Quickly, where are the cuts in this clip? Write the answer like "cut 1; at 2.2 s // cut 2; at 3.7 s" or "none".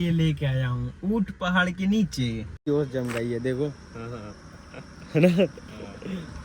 cut 1; at 2.6 s